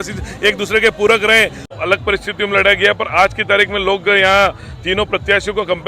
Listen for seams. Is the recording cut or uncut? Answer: cut